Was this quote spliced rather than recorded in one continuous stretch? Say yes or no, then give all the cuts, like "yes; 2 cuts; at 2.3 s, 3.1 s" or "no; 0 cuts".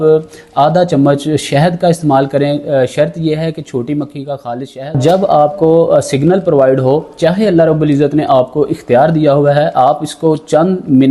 yes; 1 cut; at 5.0 s